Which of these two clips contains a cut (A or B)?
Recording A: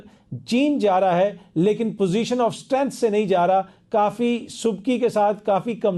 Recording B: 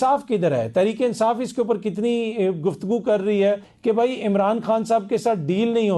B